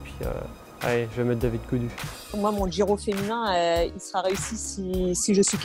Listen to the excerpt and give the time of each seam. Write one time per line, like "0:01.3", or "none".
0:02.4